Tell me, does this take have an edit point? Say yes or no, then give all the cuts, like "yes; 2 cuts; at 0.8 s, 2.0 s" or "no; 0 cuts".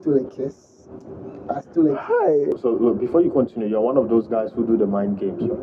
yes; 1 cut; at 2.6 s